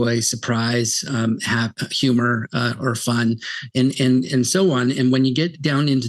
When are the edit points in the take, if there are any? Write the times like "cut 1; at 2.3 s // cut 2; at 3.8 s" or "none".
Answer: none

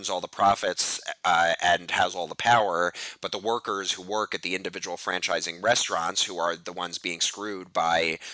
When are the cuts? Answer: none

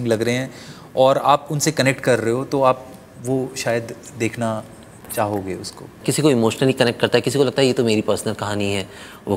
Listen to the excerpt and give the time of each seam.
cut 1; at 6.0 s

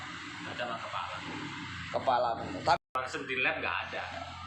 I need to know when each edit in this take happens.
cut 1; at 2.8 s

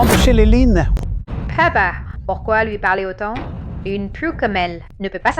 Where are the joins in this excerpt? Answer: cut 1; at 1.2 s

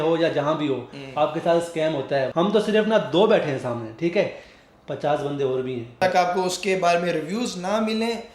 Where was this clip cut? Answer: cut 1; at 2.3 s // cut 2; at 6.0 s

